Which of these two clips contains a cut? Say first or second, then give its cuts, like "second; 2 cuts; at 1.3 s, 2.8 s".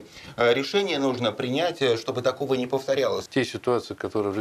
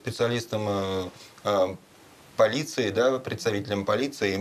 first; 1 cut; at 3.2 s